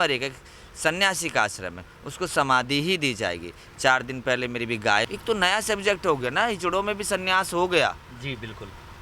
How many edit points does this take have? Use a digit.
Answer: 1